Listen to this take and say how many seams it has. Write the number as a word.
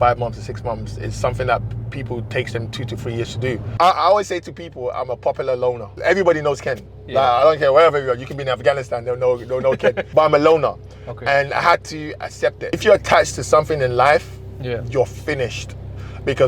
four